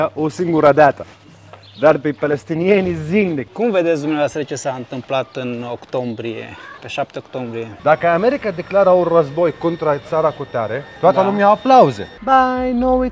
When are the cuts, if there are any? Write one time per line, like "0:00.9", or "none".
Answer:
0:03.5
0:07.6
0:12.1